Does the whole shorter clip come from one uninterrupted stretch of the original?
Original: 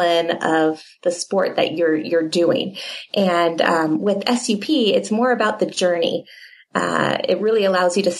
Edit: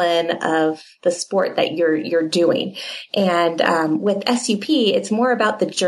yes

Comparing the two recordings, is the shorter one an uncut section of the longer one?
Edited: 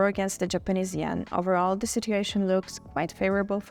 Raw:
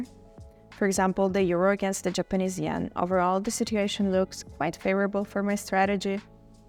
yes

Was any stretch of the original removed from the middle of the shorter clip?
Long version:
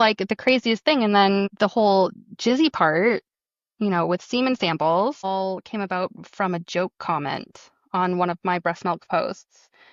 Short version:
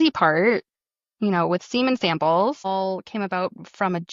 no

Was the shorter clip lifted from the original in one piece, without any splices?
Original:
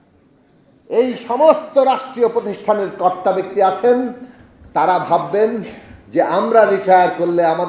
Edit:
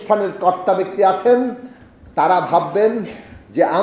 yes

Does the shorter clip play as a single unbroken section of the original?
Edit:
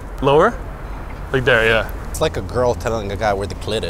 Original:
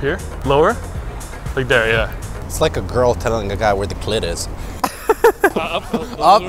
no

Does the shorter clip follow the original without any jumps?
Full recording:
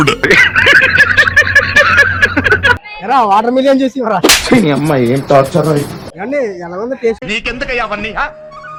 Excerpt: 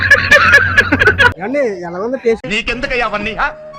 no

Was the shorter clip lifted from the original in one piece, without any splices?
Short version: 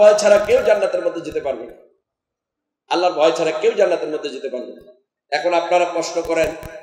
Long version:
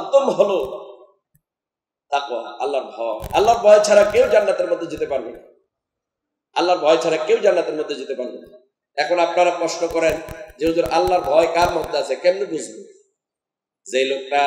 yes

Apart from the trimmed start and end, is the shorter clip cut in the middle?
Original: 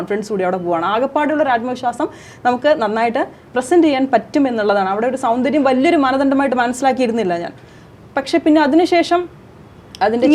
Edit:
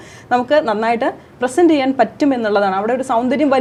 no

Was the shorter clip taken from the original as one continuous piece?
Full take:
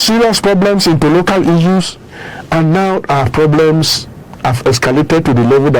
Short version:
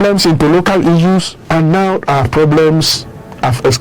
no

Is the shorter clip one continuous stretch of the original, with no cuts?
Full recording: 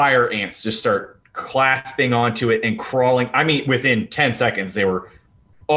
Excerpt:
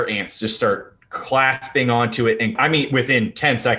no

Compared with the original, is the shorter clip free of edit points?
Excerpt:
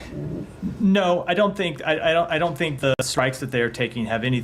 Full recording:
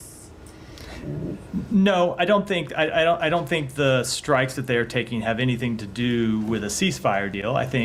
no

